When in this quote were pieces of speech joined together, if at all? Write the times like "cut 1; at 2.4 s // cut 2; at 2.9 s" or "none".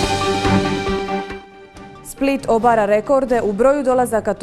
cut 1; at 1.3 s